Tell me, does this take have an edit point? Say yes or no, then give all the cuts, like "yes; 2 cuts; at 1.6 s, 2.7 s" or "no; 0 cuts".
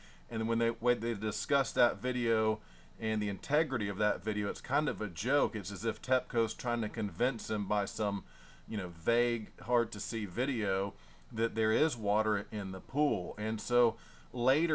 no; 0 cuts